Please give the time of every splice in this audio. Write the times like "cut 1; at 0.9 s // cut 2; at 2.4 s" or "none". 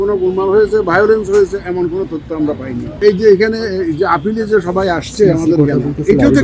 cut 1; at 3.0 s